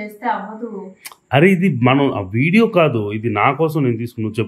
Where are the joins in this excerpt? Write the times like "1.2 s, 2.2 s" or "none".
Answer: none